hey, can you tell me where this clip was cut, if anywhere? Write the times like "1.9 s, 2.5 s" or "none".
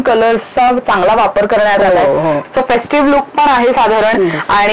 2.4 s